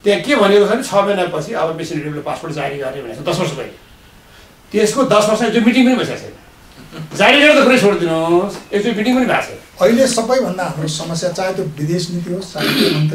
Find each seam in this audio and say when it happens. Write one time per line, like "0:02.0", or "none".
0:09.6

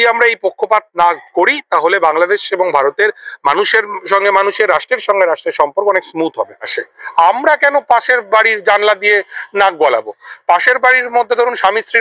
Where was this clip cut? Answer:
0:06.8

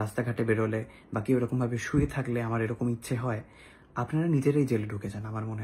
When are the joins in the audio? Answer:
none

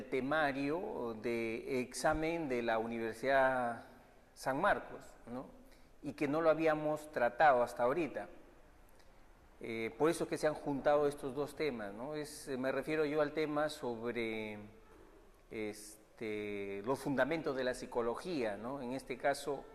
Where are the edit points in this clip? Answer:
0:17.5

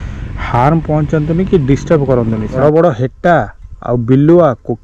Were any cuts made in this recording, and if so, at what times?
0:02.5

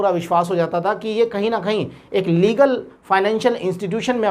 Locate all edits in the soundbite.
none

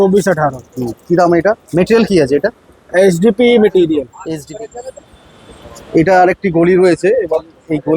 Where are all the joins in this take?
0:01.6
0:04.2

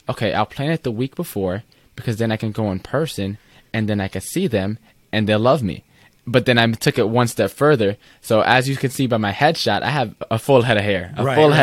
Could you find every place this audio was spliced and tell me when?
0:10.3

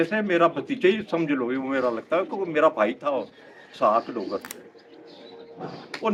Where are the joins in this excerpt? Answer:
none

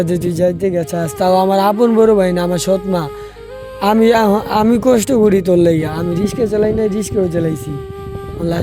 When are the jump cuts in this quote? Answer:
none

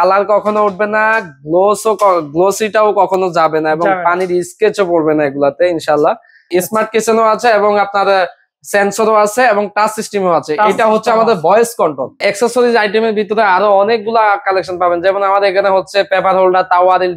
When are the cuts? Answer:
0:06.5
0:12.2

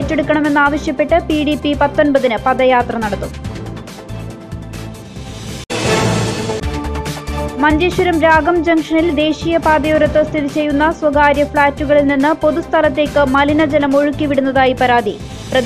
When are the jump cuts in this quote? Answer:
none

